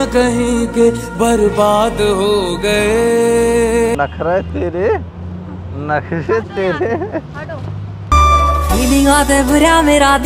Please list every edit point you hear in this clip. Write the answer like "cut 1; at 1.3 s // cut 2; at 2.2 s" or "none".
cut 1; at 4.0 s